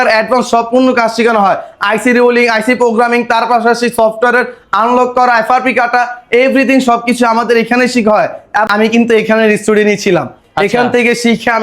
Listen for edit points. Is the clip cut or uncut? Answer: cut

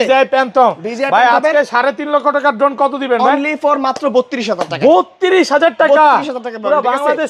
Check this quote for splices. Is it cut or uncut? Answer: uncut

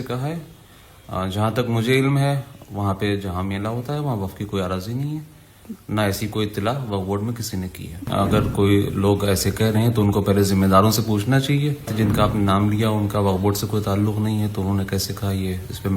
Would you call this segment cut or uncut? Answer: cut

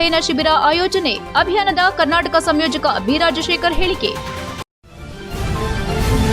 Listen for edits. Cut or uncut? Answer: cut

